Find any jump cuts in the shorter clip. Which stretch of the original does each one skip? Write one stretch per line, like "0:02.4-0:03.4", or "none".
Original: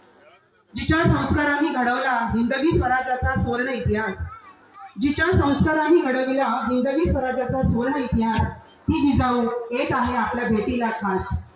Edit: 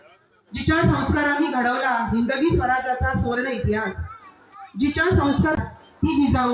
0:05.8-0:08.4